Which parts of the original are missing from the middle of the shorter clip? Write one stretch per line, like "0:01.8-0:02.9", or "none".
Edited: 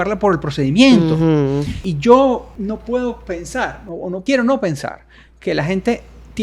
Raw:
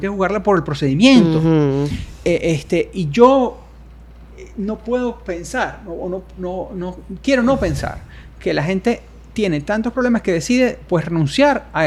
0:02.1-0:03.0
0:03.6-0:04.5
0:06.2-0:07.2